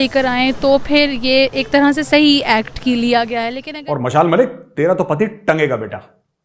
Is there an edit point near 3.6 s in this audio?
yes; 1 cut; at 3.6 s

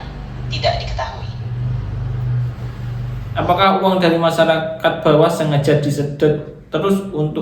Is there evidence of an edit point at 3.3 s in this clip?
yes; 1 cut; at 3.3 s

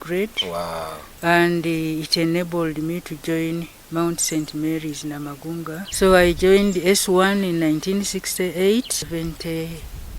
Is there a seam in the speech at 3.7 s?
no; 2 cuts; at 5.9 s, 9.1 s

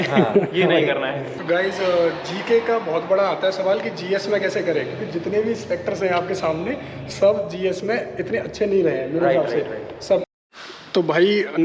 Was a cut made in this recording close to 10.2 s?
yes; 2 cuts; at 1.2 s, 10.2 s

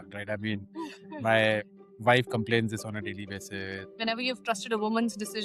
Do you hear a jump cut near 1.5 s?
no; 1 cut; at 3.8 s

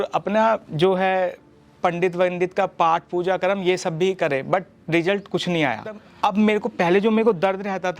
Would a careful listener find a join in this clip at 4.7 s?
no; 1 cut; at 6.1 s

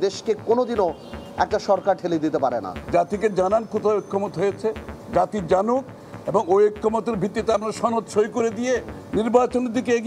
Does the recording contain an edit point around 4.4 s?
no; 1 cut; at 2.8 s

